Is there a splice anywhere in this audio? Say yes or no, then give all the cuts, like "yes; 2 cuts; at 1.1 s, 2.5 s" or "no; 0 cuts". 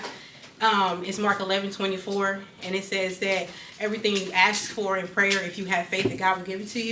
no; 0 cuts